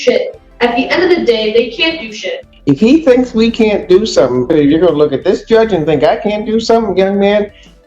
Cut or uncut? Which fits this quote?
cut